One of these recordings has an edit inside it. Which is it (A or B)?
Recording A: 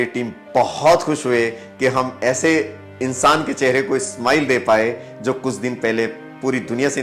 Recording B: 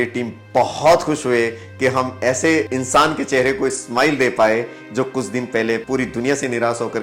B